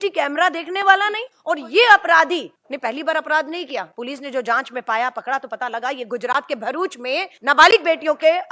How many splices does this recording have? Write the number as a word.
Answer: four